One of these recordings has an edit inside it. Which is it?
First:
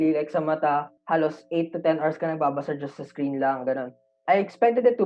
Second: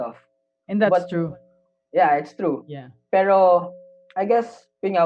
first; 2 cuts; at 0.9 s, 4.1 s

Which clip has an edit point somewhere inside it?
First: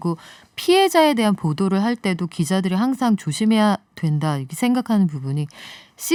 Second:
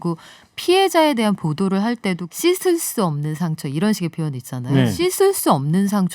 second; 2 cuts; at 2.3 s, 4.9 s

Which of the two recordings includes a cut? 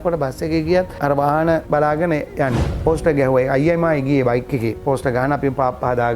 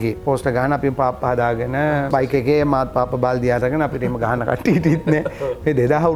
first; 1 cut; at 2.8 s

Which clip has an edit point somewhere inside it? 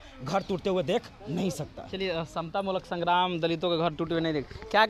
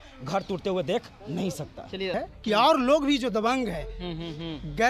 second; 1 cut; at 2.1 s

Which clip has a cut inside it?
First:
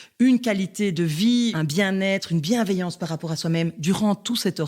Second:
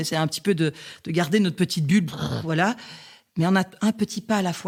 first; 1 cut; at 1.5 s

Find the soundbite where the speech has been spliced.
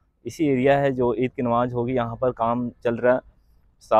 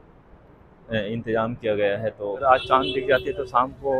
second; 1 cut; at 2.4 s

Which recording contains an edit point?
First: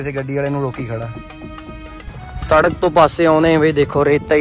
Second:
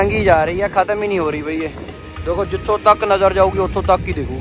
first; 1 cut; at 2.2 s

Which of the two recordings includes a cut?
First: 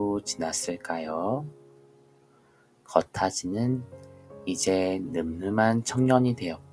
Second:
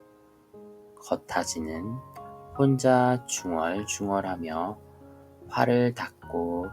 second; 1 cut; at 1.1 s

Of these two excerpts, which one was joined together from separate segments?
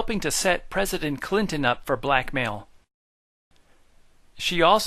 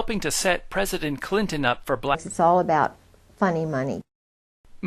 first; 1 cut; at 2.1 s

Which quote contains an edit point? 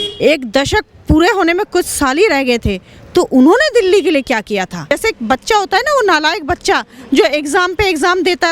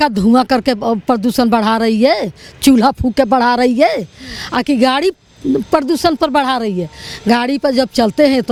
first; 1 cut; at 4.9 s

